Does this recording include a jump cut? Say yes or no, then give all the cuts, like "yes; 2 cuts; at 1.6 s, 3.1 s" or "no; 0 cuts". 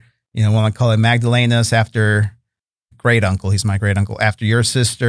yes; 1 cut; at 2.8 s